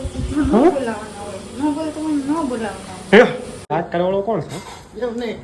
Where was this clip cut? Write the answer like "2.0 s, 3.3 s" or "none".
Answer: 3.7 s